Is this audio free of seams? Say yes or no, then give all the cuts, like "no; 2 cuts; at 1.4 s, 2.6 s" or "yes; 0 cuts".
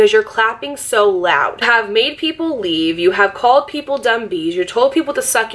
no; 1 cut; at 1.7 s